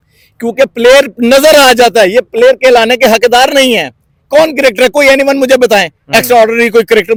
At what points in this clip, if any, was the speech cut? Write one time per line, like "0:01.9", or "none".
none